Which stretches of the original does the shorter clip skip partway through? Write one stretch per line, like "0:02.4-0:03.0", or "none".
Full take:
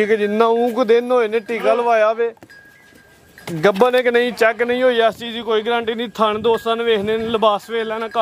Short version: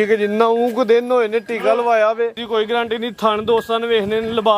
0:02.4-0:05.4